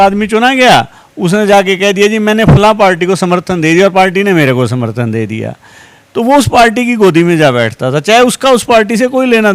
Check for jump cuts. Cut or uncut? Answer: uncut